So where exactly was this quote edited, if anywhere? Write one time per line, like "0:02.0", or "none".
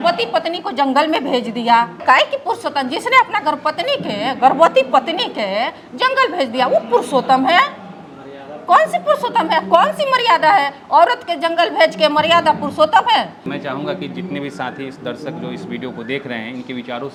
none